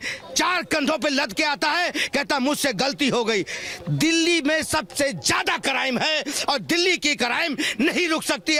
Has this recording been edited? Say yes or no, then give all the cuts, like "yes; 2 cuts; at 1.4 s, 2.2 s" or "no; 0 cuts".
no; 0 cuts